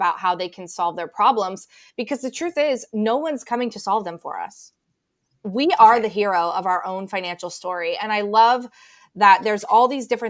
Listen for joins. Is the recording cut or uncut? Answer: uncut